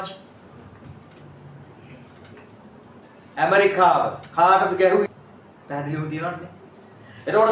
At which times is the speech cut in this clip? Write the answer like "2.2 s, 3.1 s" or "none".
5.0 s